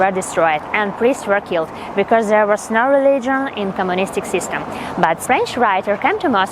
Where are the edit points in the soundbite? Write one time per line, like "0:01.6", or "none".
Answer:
0:05.2

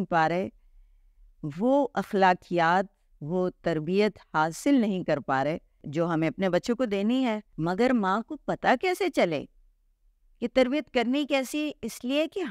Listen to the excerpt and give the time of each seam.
0:05.8
0:07.5

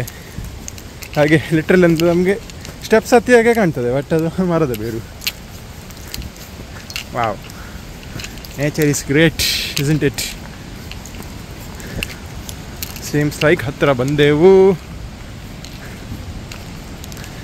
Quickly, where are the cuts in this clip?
none

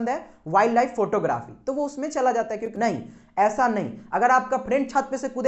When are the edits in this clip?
0:02.7

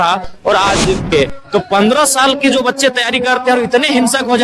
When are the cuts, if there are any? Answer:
0:01.1

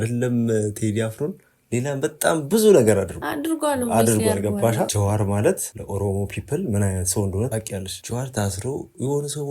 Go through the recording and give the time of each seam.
0:08.0

